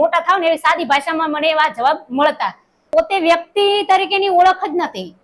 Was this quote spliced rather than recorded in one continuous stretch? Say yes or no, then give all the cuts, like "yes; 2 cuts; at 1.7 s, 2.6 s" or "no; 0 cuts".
yes; 1 cut; at 2.9 s